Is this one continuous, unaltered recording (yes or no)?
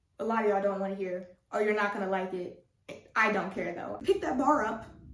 no